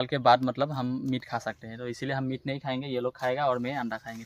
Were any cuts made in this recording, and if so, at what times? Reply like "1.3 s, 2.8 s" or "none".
none